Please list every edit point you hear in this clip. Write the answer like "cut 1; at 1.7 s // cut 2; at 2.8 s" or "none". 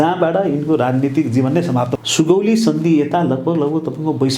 cut 1; at 2.0 s